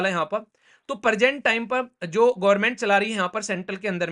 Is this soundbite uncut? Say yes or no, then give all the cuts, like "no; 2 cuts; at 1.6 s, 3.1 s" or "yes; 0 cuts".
yes; 0 cuts